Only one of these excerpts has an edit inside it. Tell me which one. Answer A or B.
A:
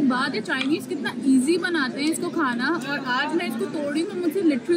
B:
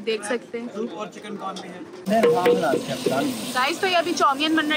B